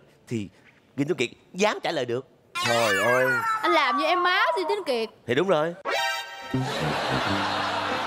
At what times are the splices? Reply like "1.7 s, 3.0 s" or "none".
none